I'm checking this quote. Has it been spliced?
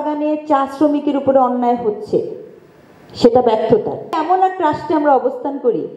yes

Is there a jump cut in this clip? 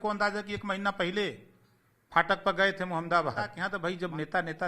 yes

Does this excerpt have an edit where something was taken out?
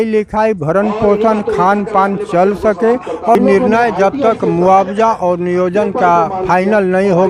yes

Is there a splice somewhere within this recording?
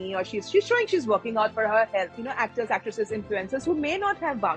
yes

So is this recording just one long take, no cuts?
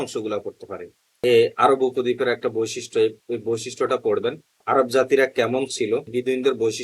no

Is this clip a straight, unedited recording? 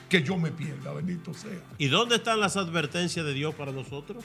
no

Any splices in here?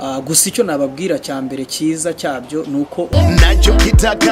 yes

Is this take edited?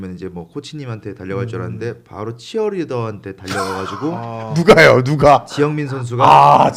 no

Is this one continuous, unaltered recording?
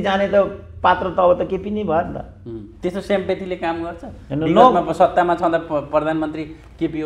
yes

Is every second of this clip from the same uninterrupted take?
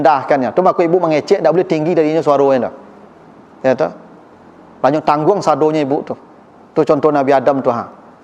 yes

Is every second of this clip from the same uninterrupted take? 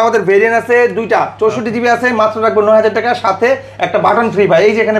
yes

